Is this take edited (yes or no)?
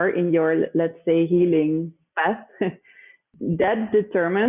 yes